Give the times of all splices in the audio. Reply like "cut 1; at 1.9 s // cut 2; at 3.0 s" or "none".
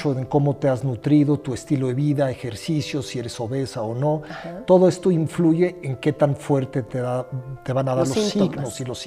none